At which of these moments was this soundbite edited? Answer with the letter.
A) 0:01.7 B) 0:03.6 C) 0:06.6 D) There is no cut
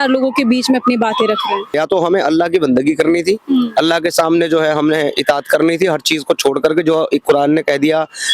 A